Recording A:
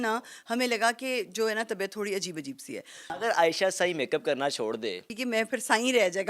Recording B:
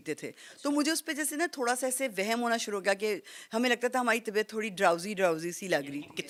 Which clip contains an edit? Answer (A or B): A